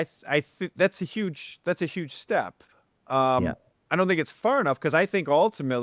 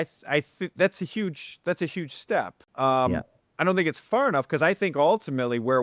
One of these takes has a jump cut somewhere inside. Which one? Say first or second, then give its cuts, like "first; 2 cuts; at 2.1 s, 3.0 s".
second; 1 cut; at 2.6 s